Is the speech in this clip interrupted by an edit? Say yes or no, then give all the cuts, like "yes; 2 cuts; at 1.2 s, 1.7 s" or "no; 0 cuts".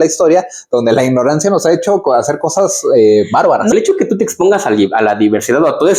yes; 1 cut; at 3.7 s